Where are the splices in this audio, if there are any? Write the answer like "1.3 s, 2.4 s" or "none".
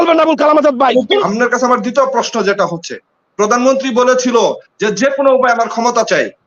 1.2 s